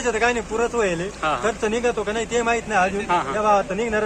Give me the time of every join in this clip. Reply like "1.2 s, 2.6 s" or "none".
none